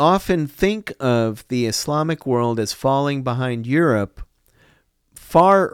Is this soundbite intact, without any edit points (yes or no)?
yes